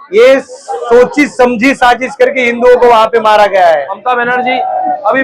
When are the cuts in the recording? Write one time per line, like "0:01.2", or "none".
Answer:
0:03.9